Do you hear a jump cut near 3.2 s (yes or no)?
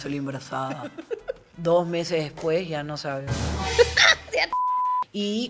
no